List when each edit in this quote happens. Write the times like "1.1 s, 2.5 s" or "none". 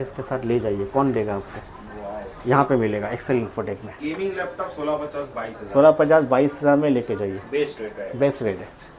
none